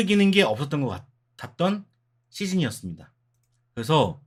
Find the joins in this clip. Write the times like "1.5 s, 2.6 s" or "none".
none

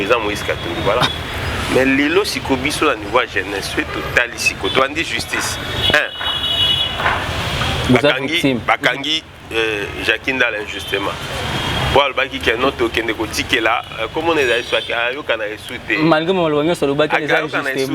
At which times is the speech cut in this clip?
1.1 s

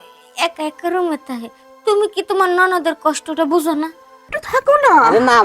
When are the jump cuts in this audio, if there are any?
4.4 s

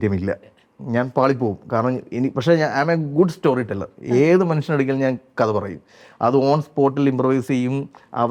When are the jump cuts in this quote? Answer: none

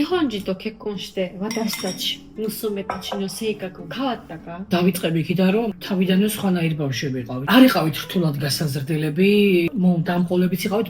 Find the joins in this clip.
none

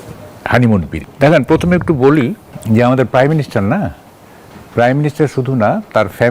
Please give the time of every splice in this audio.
0.9 s, 2.5 s

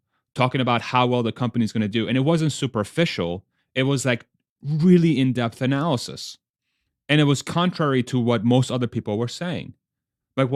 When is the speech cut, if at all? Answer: none

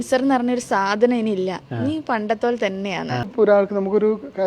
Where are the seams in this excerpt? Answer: 3.3 s

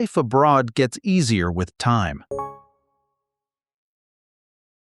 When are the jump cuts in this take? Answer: none

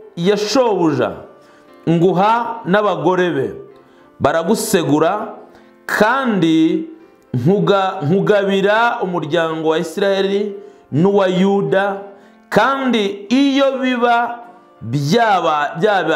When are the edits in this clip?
none

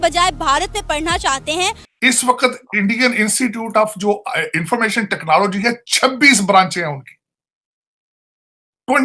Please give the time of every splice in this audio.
1.9 s

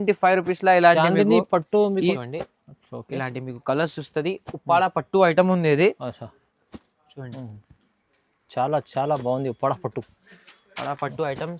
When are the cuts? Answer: 2.1 s

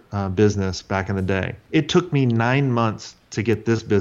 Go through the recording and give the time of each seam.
1.6 s

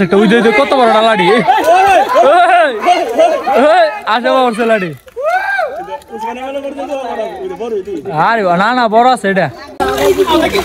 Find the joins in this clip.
9.7 s

